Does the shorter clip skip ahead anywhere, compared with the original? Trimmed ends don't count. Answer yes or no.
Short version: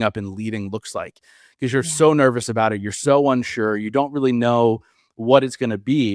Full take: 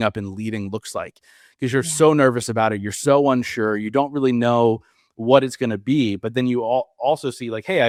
no